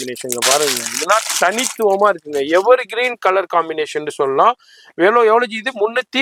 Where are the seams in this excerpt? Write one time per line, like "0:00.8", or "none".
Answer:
none